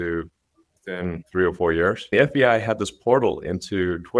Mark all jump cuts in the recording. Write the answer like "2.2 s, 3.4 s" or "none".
1.2 s, 2.0 s